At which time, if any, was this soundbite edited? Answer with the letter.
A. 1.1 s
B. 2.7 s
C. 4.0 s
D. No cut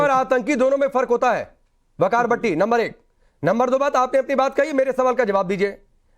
B